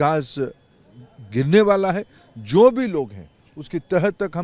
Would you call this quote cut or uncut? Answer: uncut